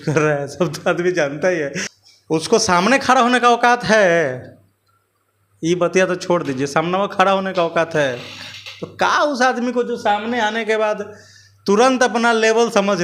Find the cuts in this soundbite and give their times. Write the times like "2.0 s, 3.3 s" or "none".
1.9 s